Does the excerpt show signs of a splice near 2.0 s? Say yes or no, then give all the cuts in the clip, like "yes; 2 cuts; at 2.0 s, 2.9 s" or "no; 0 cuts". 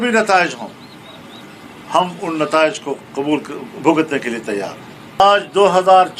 no; 1 cut; at 5.2 s